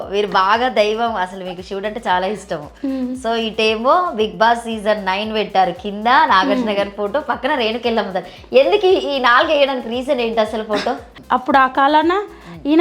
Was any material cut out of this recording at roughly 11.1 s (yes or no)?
yes